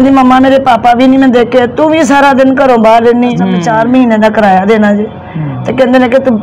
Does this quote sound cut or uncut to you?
cut